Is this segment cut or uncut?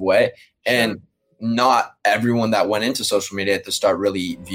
uncut